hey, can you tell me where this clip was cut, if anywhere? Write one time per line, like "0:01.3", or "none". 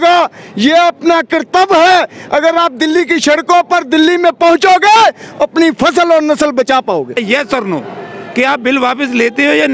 0:07.1